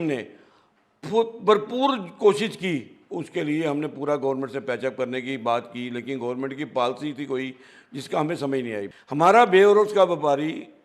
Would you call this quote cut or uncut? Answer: cut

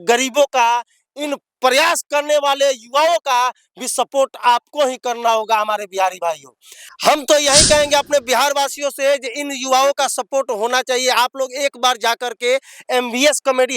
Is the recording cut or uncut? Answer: cut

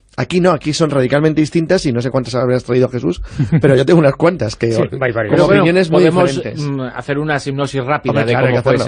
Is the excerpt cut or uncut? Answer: uncut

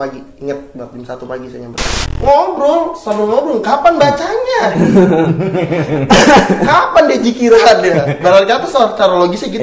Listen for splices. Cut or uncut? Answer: cut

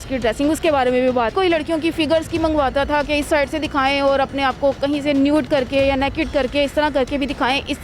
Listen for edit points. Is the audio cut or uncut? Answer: cut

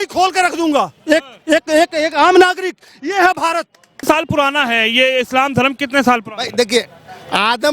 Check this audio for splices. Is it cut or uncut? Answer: cut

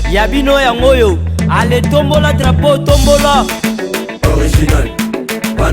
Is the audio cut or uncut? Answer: cut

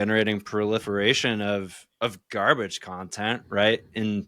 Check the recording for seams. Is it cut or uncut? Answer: uncut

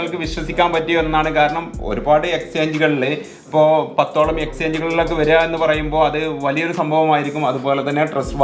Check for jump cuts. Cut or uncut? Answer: uncut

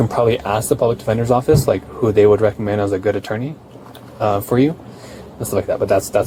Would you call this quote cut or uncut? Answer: uncut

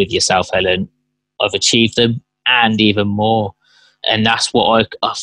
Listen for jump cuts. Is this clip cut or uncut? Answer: cut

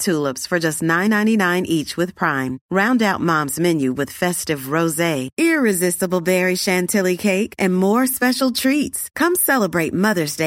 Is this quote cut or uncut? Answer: uncut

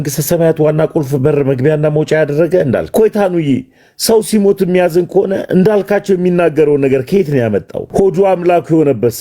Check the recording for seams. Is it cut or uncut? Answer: cut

